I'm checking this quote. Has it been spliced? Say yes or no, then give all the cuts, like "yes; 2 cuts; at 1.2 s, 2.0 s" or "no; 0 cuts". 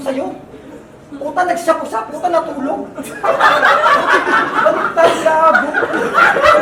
no; 0 cuts